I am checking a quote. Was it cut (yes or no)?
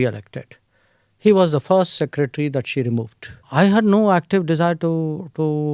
yes